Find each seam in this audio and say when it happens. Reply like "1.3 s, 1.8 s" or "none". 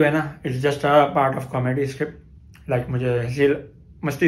none